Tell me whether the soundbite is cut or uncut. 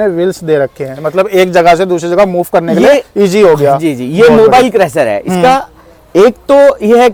uncut